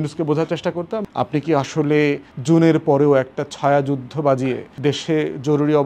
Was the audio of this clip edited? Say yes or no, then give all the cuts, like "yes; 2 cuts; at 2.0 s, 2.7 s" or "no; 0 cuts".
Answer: yes; 3 cuts; at 1.1 s, 2.3 s, 4.7 s